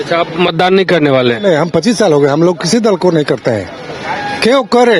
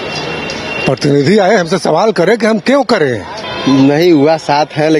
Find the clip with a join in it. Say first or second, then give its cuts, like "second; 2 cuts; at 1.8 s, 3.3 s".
second; 1 cut; at 3.4 s